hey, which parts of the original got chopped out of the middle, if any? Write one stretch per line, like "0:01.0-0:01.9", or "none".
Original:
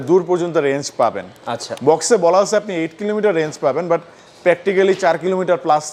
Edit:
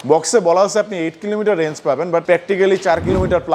0:04.0-0:04.4